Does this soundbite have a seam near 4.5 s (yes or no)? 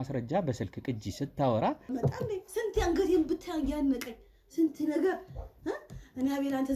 no